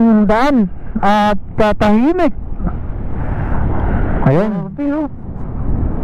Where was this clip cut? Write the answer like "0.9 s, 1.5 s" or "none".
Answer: 4.7 s